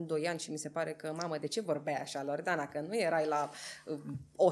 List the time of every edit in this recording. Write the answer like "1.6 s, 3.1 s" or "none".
none